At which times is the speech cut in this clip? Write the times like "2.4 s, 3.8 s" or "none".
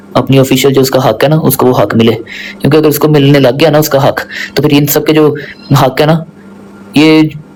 none